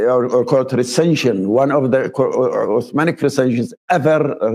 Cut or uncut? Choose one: uncut